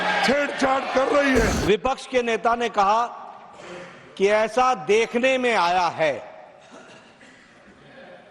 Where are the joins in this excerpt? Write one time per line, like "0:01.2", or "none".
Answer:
0:01.6